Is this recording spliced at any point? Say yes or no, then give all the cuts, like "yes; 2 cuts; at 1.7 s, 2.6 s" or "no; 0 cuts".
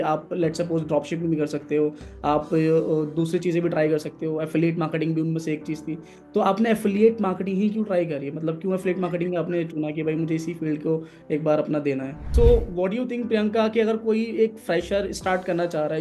yes; 1 cut; at 12.3 s